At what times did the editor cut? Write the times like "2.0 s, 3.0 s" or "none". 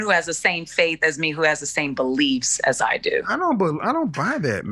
none